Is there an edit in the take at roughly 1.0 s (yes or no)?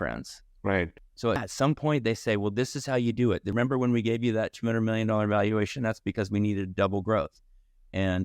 yes